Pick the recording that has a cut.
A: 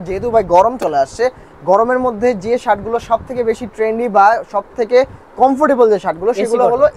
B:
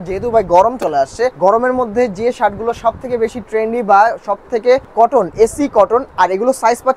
B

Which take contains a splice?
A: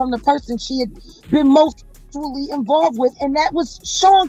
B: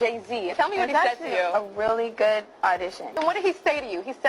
B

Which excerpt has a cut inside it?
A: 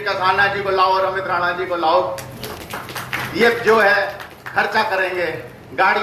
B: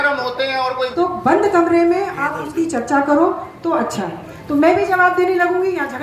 B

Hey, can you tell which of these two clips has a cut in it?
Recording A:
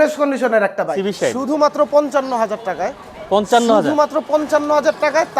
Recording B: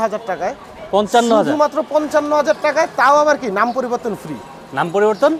A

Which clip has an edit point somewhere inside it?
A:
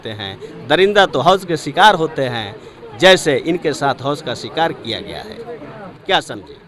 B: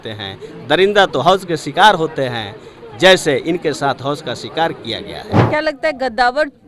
B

